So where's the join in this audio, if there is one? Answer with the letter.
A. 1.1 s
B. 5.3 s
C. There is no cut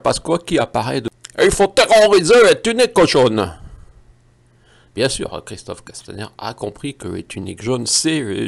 A